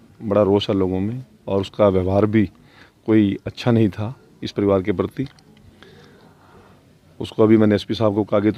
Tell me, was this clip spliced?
no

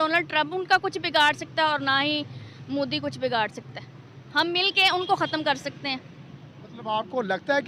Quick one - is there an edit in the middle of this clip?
no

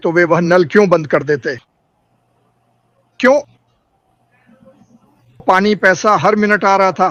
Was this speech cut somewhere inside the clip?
no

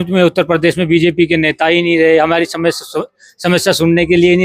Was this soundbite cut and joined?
no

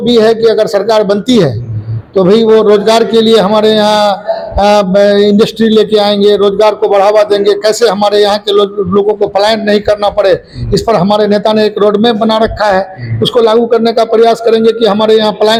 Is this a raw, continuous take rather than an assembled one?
yes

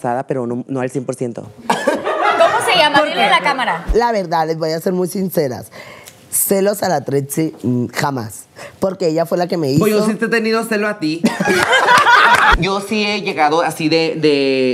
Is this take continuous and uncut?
no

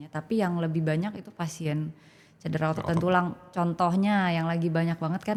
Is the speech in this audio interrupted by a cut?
no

